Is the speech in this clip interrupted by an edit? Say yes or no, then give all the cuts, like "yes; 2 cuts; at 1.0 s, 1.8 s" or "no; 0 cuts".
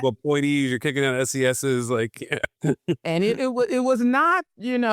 no; 0 cuts